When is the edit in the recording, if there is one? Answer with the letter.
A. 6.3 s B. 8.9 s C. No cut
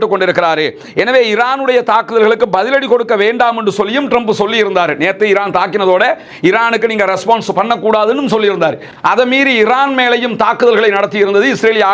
C